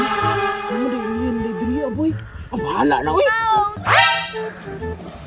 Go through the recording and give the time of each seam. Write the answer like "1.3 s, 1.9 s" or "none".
3.8 s